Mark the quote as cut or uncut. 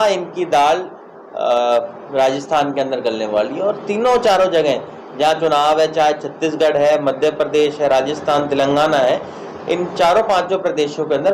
uncut